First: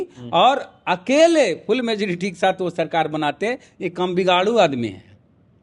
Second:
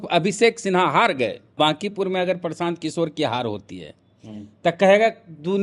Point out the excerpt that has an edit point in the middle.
second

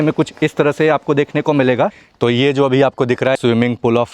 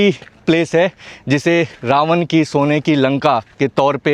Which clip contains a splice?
first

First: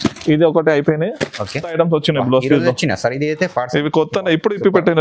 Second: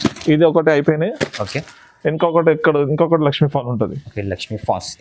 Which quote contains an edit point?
first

